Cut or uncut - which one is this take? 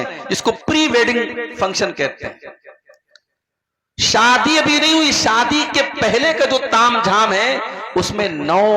uncut